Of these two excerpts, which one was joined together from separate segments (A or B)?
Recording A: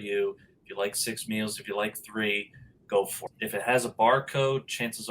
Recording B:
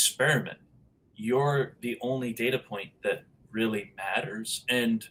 A